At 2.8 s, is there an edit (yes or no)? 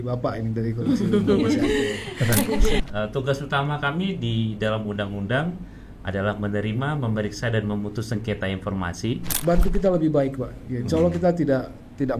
yes